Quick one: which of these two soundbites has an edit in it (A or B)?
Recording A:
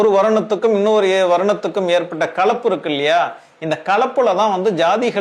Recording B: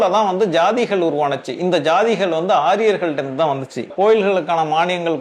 B